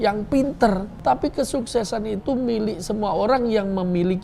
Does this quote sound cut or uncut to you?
cut